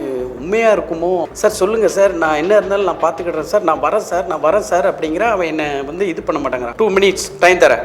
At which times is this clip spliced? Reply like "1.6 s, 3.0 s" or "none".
1.3 s, 6.7 s